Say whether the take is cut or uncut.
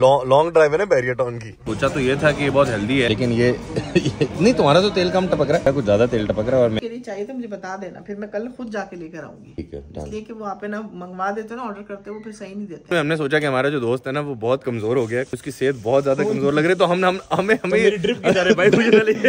cut